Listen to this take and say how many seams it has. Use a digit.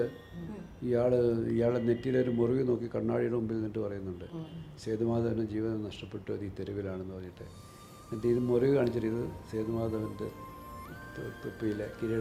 0